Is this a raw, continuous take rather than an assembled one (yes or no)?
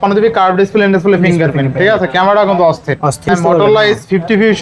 no